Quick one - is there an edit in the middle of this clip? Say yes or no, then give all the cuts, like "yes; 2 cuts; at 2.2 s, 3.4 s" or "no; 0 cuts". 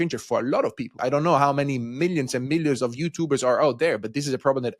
yes; 1 cut; at 1.0 s